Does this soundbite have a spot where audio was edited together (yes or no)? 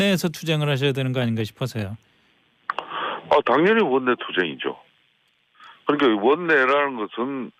no